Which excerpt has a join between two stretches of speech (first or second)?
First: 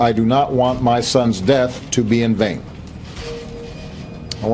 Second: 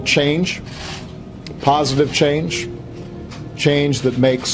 first